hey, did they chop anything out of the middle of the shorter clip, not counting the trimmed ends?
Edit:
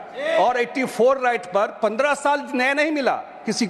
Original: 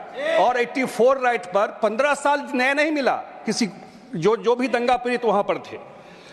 no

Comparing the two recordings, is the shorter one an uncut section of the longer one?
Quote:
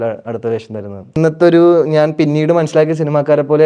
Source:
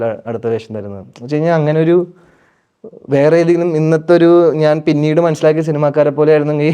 no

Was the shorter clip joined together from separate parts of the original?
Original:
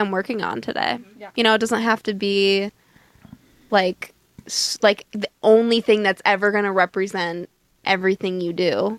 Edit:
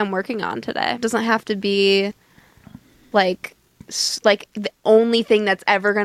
yes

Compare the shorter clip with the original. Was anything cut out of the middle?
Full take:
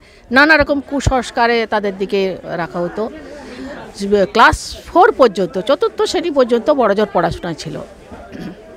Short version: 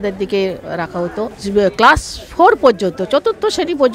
yes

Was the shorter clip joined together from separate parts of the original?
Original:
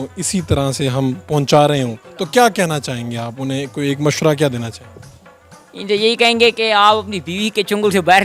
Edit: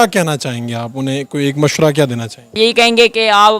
yes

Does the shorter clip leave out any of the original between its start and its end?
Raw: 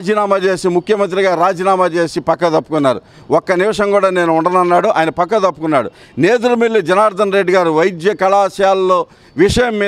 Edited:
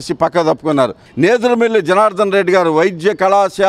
yes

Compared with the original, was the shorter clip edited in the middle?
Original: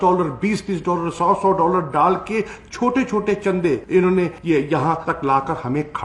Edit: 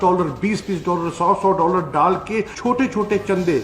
yes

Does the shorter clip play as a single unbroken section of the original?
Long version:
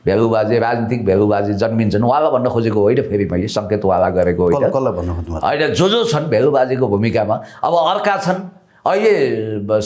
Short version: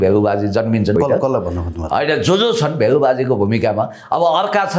no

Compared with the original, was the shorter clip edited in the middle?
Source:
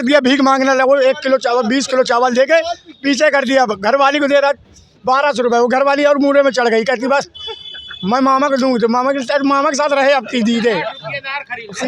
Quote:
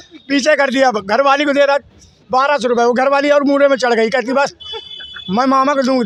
no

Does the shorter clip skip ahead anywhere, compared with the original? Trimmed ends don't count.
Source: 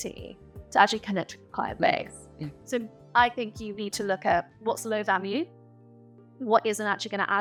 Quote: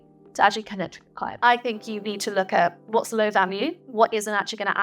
yes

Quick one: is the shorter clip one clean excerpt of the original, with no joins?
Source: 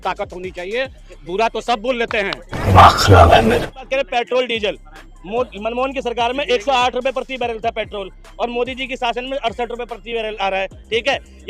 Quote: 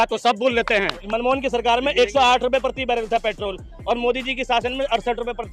no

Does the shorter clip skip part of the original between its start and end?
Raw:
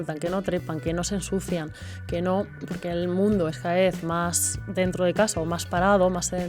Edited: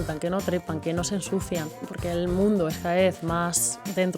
yes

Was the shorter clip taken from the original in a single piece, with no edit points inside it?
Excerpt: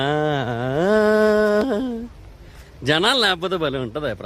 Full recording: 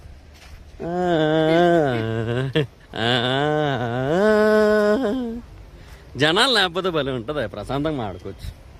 yes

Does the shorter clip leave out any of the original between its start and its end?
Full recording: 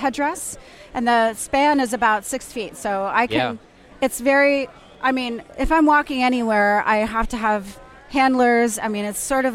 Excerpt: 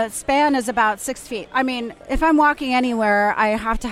yes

